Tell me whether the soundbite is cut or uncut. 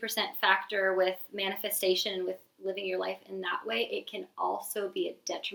uncut